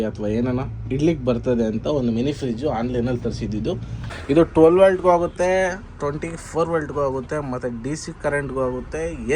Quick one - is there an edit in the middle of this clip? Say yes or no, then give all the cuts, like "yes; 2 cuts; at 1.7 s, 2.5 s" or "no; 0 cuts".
yes; 1 cut; at 4.1 s